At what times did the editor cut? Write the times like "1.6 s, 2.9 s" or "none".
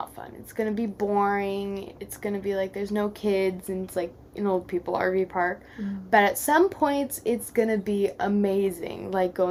none